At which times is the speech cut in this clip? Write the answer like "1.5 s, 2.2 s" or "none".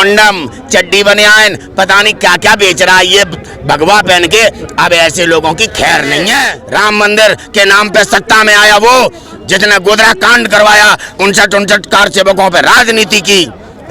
6.6 s